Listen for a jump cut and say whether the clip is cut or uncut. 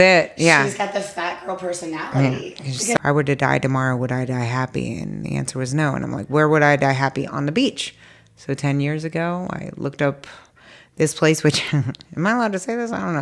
cut